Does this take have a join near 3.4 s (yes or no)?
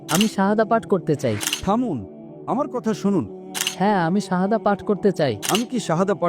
yes